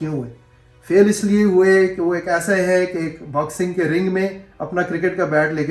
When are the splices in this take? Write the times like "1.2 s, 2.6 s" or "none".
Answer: none